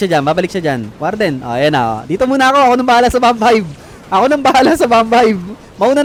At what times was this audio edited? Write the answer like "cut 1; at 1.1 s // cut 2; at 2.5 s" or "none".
none